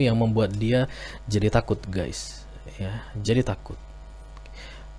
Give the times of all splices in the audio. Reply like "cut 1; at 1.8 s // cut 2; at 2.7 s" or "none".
none